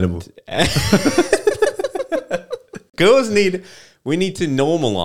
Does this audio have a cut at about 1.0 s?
no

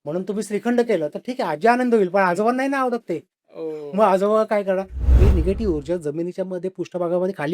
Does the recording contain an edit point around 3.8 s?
no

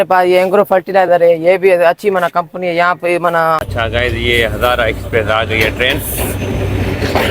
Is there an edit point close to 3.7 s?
yes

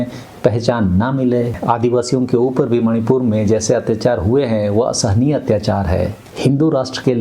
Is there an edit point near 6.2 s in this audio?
yes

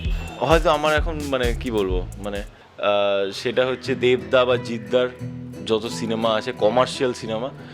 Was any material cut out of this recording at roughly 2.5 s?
yes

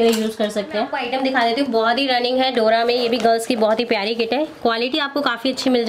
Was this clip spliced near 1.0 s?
yes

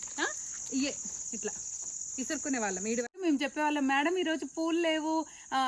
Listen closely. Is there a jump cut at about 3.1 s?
yes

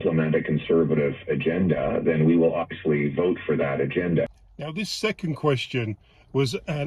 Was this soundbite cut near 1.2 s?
no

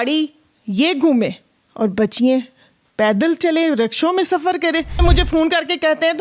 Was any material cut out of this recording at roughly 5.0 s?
yes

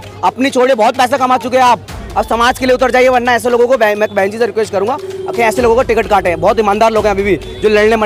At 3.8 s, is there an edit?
no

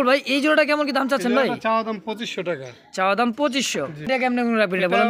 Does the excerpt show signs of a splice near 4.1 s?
yes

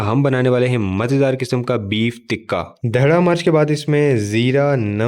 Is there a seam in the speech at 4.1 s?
no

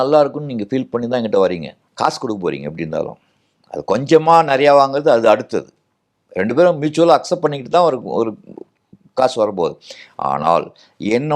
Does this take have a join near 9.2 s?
no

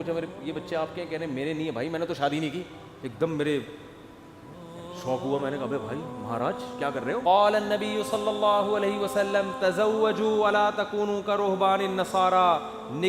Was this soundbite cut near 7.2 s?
yes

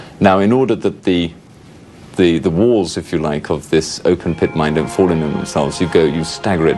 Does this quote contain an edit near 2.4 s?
yes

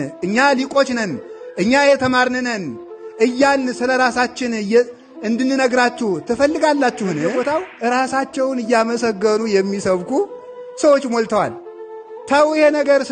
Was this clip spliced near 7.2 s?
yes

